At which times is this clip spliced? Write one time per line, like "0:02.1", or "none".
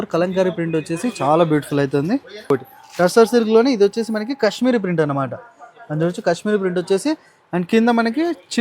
0:02.5